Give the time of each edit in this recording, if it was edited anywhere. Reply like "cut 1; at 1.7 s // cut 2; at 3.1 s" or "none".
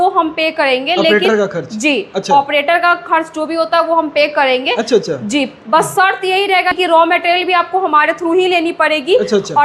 cut 1; at 6.8 s